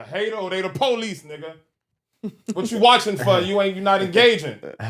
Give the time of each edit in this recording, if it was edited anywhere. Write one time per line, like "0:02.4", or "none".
none